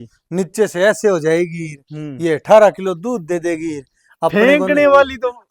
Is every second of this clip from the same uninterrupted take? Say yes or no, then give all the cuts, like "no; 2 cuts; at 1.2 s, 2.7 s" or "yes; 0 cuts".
yes; 0 cuts